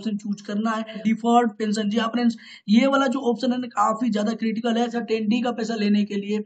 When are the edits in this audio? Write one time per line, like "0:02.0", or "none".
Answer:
0:01.0
0:05.0